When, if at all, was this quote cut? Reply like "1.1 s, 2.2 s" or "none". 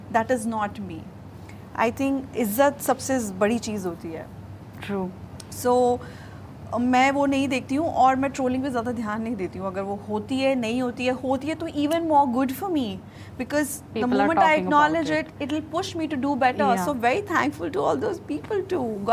none

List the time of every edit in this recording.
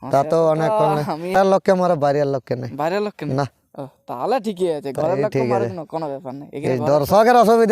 1.3 s

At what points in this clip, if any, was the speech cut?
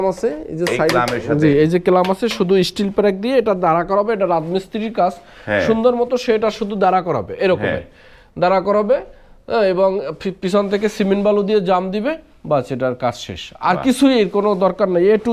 none

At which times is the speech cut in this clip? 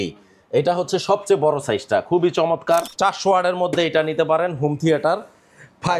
2.9 s

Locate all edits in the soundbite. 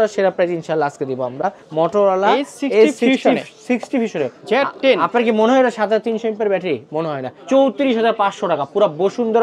1.6 s, 4.4 s, 7.3 s

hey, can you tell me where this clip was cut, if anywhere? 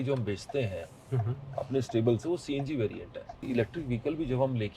3.4 s

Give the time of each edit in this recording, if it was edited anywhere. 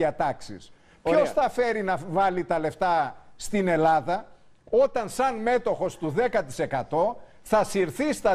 1.5 s

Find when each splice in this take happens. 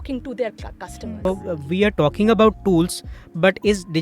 1.2 s

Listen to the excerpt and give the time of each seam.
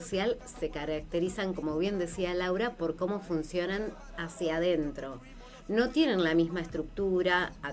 none

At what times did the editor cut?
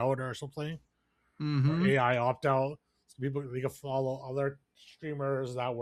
none

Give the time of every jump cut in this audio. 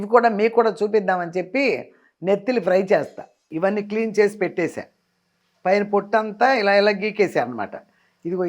3.5 s

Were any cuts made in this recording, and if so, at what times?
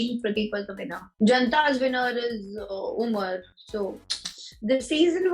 1.0 s

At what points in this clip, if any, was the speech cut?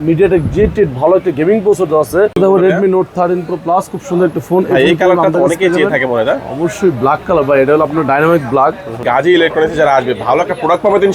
2.4 s, 9.0 s

